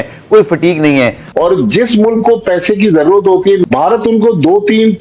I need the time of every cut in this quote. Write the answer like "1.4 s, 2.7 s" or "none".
1.3 s, 3.6 s